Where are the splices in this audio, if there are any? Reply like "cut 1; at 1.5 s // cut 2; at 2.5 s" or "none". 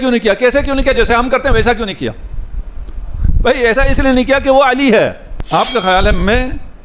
cut 1; at 5.3 s